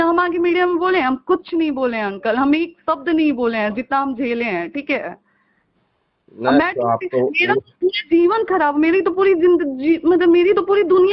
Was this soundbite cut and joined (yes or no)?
no